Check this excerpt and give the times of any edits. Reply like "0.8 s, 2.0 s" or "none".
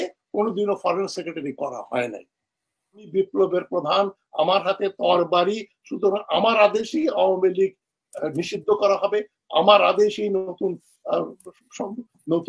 3.1 s